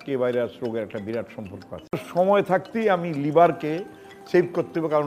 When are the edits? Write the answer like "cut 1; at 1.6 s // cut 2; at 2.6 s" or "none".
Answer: cut 1; at 2.0 s